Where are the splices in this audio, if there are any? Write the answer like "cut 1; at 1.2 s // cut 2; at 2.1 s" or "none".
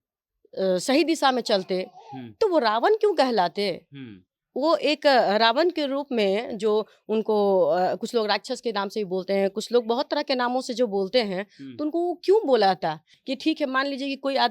cut 1; at 13.1 s